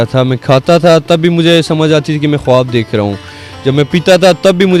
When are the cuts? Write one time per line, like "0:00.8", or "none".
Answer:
none